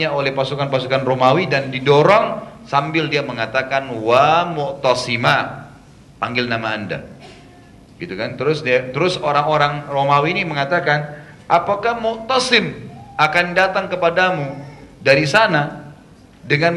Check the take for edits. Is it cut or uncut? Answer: uncut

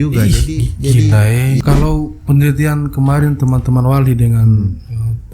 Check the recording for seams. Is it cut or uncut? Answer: cut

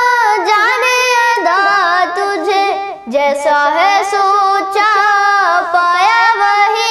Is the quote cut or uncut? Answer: uncut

